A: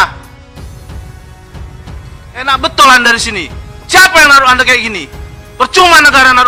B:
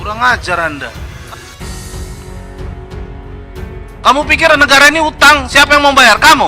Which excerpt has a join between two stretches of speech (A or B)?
B